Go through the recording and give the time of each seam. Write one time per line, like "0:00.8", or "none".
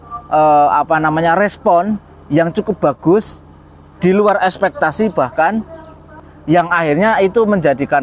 0:06.3